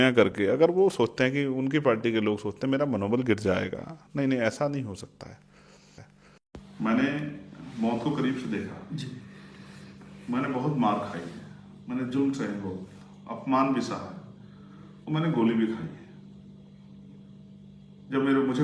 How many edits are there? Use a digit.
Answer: 0